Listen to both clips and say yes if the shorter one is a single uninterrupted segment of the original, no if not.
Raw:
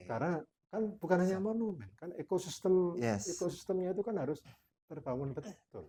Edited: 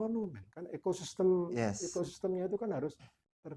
yes